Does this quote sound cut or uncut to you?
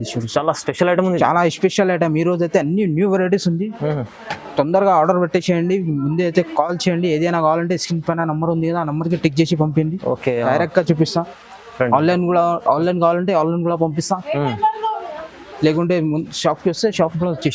uncut